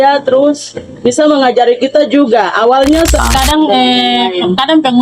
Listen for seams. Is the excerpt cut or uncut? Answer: cut